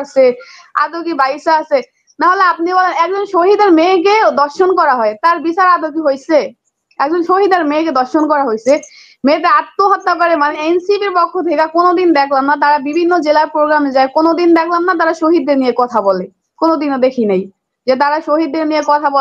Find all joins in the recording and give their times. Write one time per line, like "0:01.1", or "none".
0:10.5